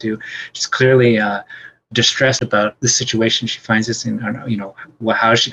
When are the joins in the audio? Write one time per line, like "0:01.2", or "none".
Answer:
0:02.4